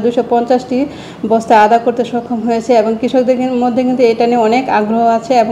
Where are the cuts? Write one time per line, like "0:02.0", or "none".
none